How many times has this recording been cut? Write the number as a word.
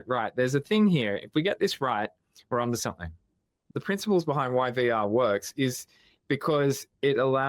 one